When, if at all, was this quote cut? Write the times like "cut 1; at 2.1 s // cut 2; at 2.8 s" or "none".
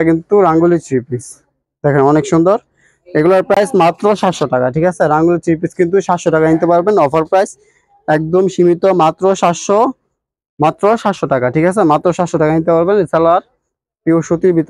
none